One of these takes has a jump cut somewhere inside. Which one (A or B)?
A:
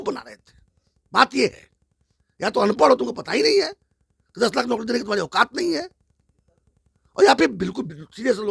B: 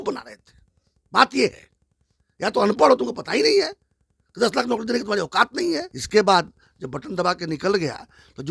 B